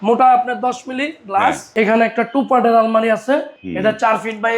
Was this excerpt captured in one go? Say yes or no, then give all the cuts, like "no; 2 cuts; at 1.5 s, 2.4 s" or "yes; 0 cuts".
no; 2 cuts; at 1.7 s, 3.6 s